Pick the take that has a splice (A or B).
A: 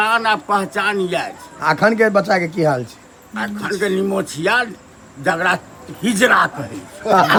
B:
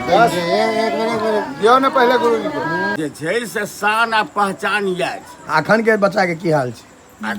B